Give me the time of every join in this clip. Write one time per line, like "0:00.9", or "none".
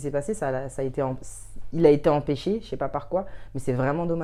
none